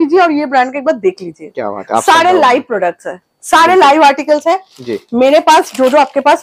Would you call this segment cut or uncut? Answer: uncut